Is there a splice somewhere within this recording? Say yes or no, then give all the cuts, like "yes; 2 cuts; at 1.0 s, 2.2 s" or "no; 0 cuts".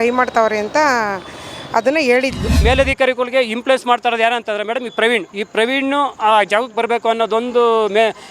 yes; 2 cuts; at 2.6 s, 5.4 s